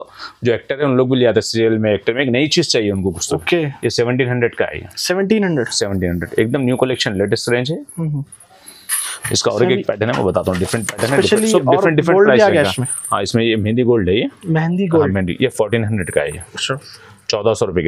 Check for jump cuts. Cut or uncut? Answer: uncut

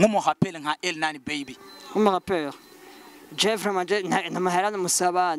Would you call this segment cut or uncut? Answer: uncut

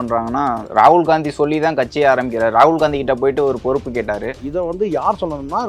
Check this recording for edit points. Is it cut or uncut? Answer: cut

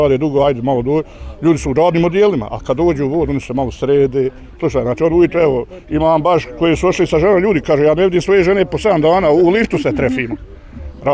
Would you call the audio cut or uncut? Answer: cut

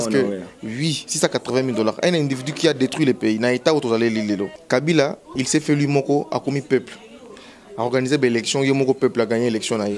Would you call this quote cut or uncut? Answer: cut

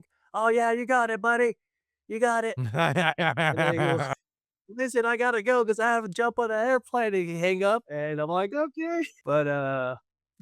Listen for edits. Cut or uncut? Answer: cut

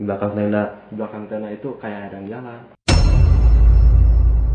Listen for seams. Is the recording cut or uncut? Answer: cut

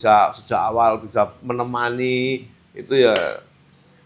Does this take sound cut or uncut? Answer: uncut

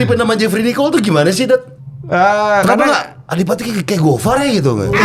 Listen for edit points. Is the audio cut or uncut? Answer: uncut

